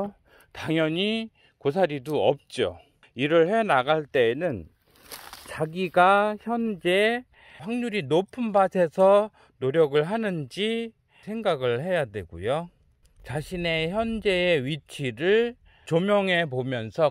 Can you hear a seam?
yes; 2 cuts; at 3.0 s, 15.9 s

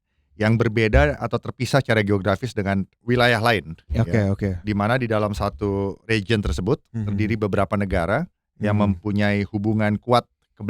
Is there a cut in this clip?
no; 0 cuts

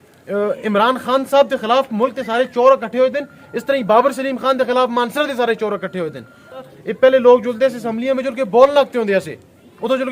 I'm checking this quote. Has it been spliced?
yes; 1 cut; at 6.7 s

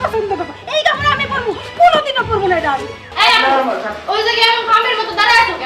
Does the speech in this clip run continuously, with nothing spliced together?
no; 1 cut; at 3.0 s

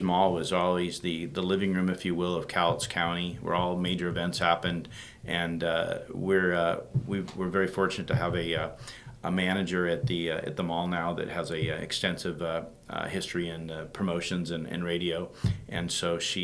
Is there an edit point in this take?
no; 0 cuts

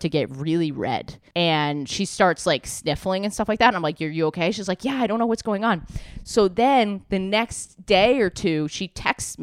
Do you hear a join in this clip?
yes; 1 cut; at 1.2 s

